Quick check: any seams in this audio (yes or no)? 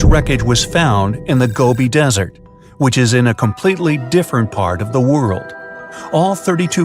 yes